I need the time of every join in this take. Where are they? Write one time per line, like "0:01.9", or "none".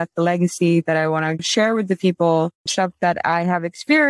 0:01.5
0:02.6